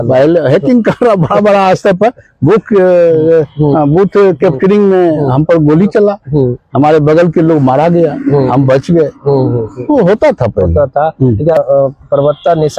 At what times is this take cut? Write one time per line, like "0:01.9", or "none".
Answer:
0:11.6